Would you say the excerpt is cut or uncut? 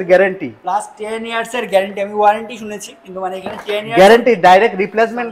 uncut